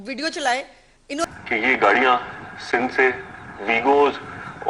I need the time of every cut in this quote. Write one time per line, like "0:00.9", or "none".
0:01.3